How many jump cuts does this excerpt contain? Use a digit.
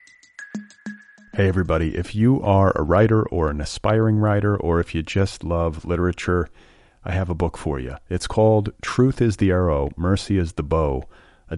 1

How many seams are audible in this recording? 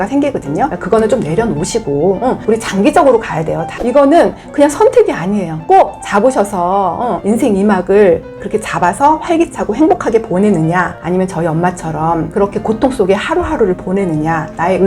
1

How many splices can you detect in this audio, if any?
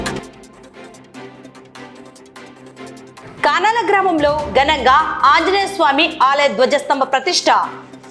2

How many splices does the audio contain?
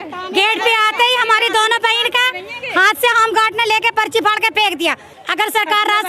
1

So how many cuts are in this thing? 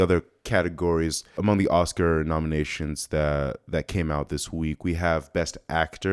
1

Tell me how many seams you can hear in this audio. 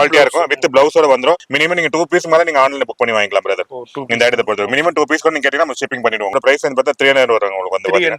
2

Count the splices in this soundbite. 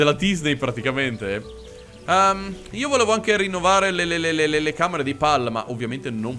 0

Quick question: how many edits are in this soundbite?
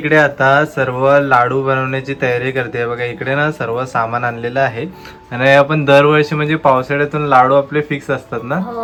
0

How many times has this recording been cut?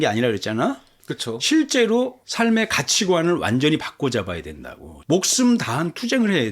1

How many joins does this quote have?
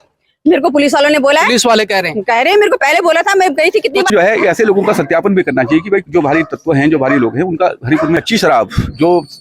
2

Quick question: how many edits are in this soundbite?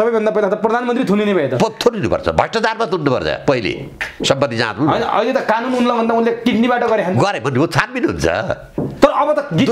1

